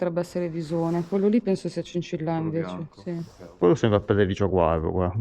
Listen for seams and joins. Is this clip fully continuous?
no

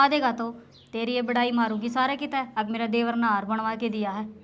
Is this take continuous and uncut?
yes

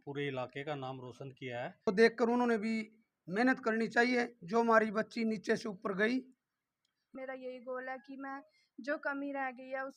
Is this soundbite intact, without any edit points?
no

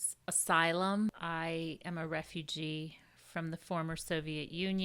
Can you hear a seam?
yes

